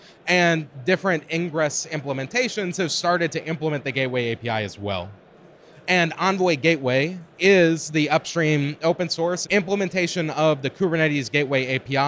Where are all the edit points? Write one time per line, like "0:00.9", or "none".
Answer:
0:09.4